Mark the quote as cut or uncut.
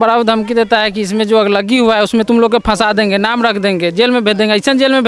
uncut